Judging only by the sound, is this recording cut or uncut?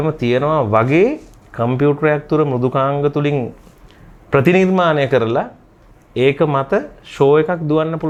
uncut